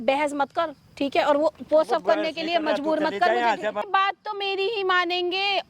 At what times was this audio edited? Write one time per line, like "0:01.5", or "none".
0:03.8